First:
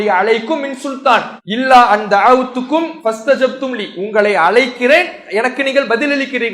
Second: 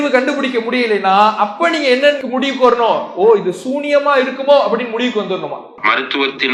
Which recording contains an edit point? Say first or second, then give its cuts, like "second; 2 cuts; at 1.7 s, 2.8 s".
first; 2 cuts; at 1.4 s, 2.9 s